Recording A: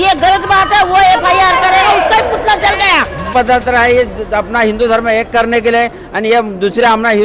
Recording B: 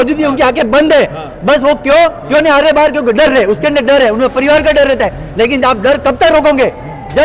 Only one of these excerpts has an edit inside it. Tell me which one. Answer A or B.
A